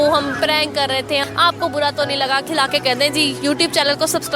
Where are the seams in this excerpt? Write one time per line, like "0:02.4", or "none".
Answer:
0:01.3
0:02.5